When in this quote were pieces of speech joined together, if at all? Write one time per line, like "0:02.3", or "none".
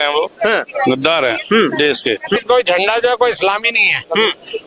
0:02.4